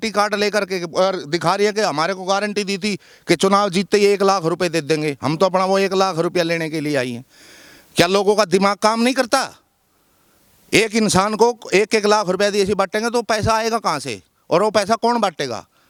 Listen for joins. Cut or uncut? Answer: uncut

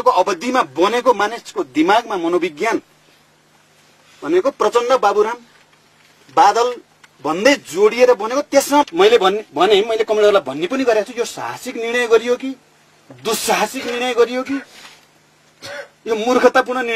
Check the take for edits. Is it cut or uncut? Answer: cut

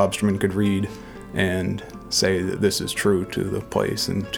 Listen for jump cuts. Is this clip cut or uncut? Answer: uncut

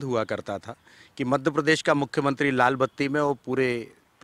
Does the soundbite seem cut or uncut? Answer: uncut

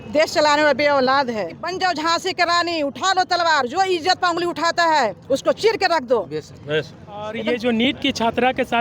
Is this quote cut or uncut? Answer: cut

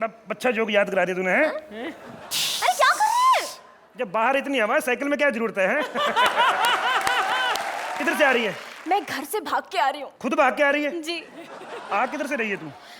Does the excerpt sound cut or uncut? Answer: uncut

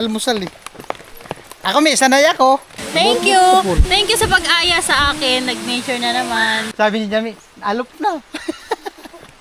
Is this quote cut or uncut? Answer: cut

